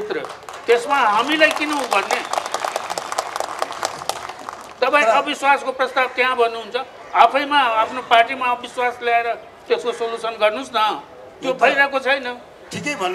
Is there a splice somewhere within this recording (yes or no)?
no